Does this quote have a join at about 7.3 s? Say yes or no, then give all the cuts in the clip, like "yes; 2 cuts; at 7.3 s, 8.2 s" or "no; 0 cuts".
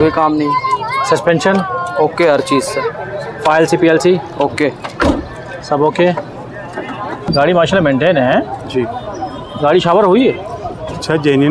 yes; 1 cut; at 7.3 s